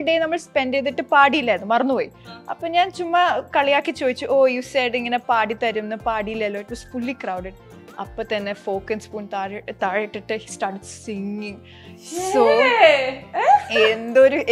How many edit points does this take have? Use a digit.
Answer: 0